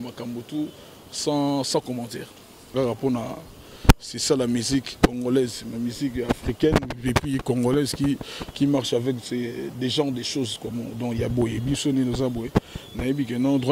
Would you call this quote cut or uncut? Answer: cut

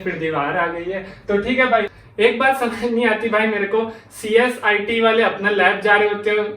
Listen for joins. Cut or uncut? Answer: cut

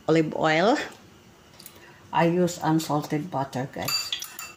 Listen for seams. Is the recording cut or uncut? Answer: cut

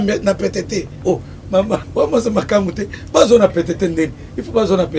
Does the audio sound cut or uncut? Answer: cut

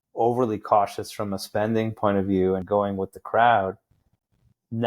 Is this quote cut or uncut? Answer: cut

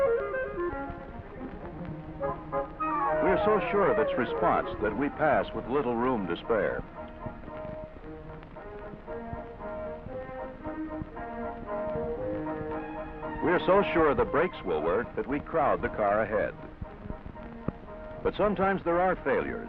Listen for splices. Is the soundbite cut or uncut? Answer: cut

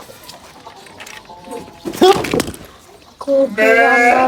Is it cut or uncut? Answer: uncut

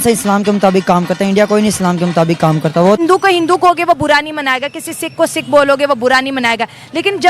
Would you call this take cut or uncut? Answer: cut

